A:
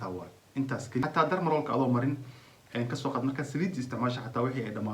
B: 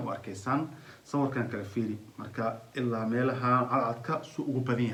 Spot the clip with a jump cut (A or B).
A